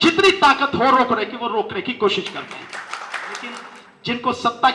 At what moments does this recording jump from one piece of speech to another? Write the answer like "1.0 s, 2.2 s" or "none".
3.7 s

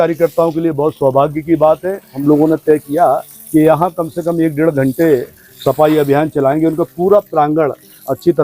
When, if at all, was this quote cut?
2.2 s

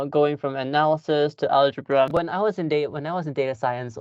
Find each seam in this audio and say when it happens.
2.2 s

